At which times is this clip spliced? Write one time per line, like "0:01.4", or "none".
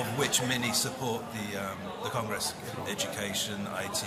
none

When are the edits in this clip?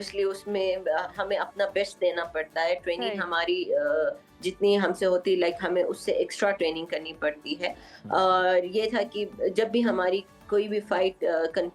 none

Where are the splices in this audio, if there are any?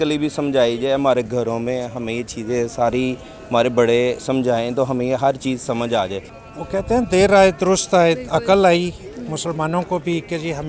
0:06.3

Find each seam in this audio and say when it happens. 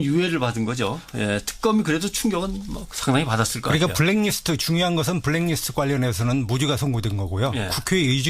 0:02.3

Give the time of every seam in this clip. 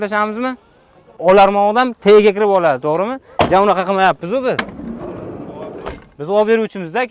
0:01.1

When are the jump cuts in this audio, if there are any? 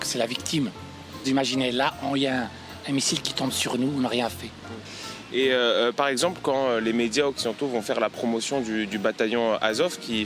0:01.2
0:04.7

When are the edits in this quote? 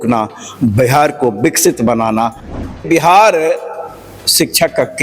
0:02.5

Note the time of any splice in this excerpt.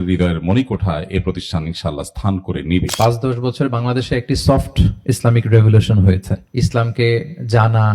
0:02.9
0:06.4

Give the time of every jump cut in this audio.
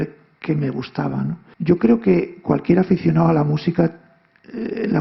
0:01.5

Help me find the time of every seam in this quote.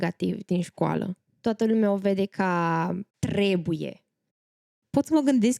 0:01.2
0:03.1
0:04.5

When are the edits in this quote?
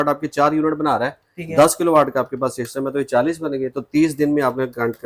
none

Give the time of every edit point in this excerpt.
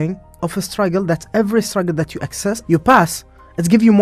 0:02.6

